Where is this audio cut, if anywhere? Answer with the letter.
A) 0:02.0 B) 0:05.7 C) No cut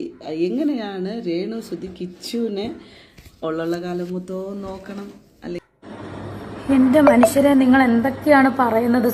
B